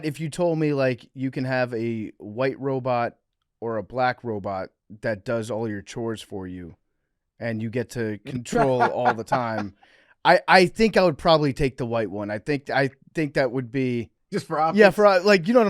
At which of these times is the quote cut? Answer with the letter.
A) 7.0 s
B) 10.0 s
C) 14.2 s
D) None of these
C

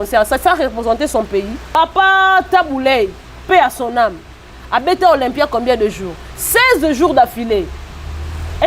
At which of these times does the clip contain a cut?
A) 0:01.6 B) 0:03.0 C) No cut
A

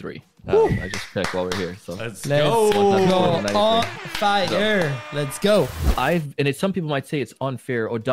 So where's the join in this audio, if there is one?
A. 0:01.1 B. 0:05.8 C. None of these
B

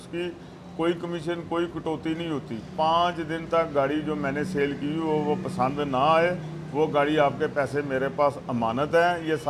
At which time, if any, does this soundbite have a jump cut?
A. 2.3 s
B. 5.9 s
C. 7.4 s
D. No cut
D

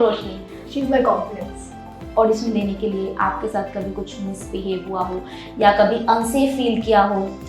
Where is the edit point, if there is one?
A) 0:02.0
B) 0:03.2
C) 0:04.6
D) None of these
A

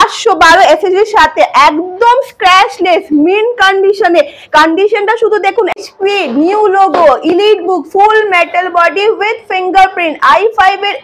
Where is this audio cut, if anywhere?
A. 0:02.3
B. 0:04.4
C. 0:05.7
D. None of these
C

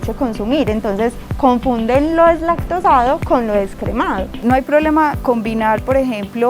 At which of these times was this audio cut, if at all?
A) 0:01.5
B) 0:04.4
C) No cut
B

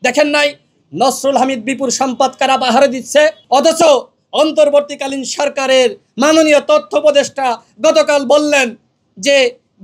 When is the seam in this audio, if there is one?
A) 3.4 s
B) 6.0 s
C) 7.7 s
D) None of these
A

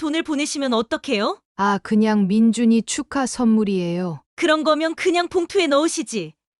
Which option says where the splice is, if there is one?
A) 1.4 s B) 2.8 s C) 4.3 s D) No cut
A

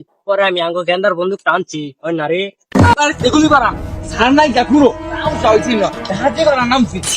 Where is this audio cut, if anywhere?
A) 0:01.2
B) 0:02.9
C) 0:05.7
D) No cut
B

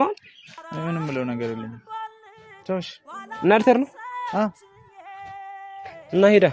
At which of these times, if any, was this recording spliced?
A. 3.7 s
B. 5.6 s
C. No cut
C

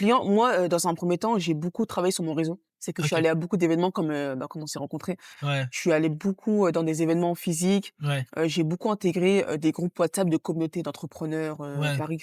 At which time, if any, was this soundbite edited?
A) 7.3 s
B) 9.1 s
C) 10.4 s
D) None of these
D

